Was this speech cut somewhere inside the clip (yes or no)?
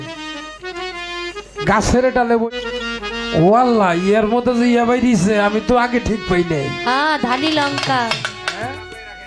yes